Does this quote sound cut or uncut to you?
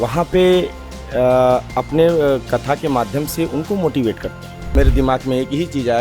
cut